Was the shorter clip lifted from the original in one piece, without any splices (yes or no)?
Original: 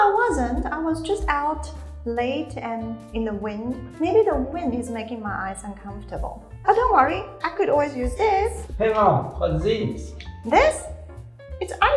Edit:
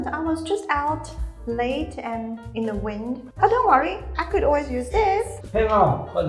no